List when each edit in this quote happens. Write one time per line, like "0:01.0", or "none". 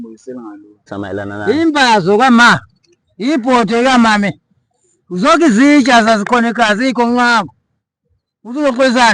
0:00.9